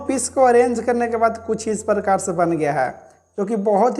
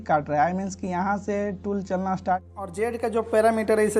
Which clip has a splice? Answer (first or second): second